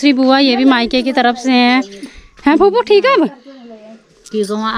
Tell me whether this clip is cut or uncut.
uncut